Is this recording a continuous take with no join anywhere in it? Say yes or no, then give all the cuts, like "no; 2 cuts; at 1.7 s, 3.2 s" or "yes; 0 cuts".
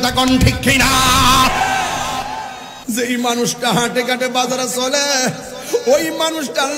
no; 1 cut; at 2.7 s